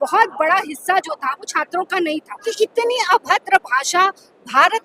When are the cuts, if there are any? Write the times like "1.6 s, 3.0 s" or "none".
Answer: 2.4 s